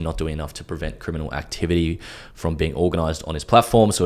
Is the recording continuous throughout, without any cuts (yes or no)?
yes